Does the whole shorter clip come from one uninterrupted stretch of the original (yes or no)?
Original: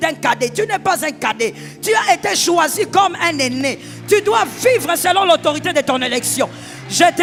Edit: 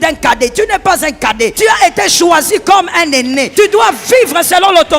no